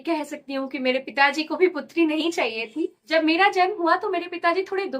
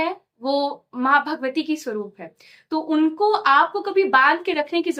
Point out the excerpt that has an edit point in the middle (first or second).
first